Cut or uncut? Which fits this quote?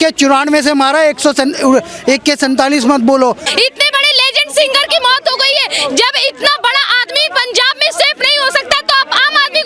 cut